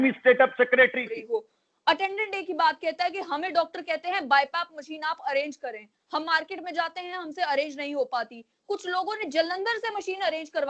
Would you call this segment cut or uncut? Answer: cut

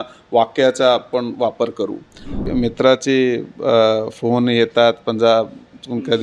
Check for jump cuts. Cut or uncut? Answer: cut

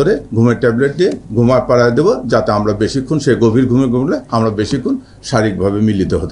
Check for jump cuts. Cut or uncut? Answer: uncut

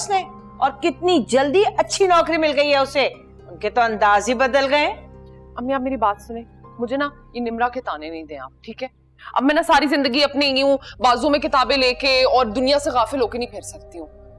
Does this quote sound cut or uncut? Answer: uncut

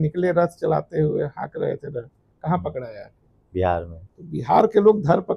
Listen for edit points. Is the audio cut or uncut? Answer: uncut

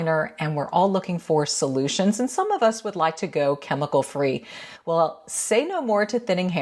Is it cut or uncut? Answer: uncut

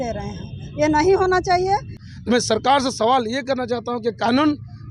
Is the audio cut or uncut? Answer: cut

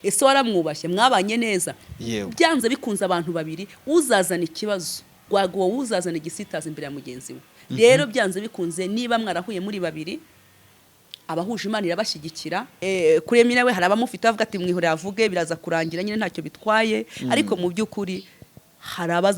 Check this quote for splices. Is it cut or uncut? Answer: cut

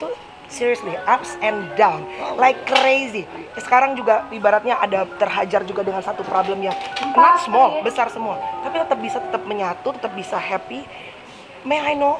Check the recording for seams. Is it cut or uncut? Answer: uncut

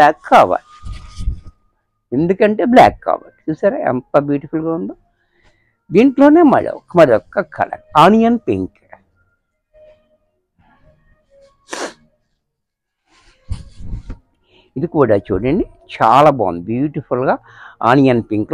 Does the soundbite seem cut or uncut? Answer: uncut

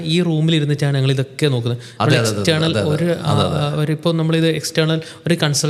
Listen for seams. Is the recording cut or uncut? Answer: uncut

